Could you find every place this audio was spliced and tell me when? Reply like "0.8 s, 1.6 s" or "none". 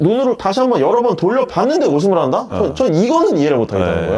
none